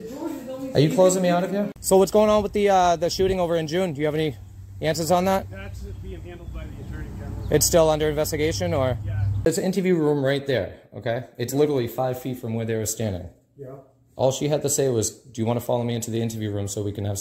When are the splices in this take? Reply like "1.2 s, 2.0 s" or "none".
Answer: 1.7 s, 9.5 s